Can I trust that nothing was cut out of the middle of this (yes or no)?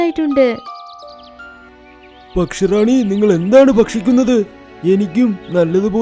yes